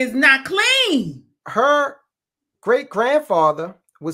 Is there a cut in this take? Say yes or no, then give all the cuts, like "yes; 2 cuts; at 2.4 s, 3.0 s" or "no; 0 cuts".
yes; 1 cut; at 1.4 s